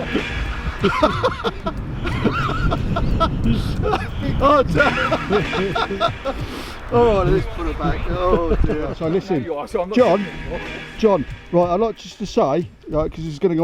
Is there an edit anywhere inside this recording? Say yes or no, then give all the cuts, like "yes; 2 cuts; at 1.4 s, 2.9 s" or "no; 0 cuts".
yes; 1 cut; at 9.0 s